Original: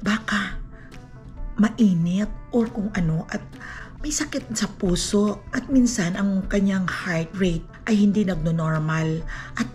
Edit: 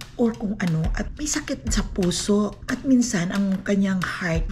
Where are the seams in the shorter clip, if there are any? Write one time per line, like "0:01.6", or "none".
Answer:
0:01.1